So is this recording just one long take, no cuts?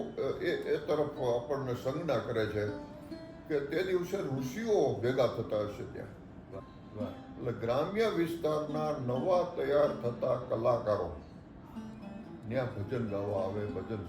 no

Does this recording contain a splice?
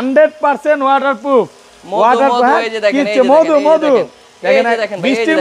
no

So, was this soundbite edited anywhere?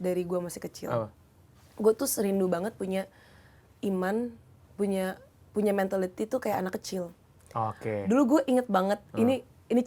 no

